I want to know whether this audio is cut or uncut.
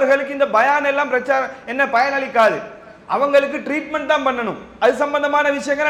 uncut